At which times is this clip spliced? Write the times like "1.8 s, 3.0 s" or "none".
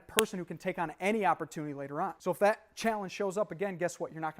2.2 s